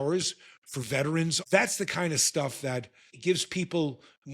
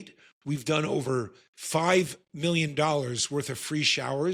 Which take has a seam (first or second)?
first